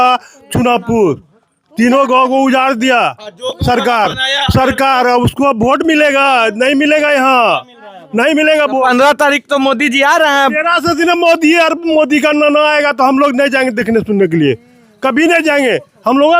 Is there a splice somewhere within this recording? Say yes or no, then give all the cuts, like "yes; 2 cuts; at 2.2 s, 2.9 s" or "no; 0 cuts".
no; 0 cuts